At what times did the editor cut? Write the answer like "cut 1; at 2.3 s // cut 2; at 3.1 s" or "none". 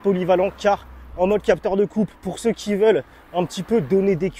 none